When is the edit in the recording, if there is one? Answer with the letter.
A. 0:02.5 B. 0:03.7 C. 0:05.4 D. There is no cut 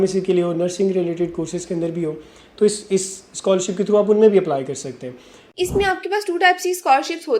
C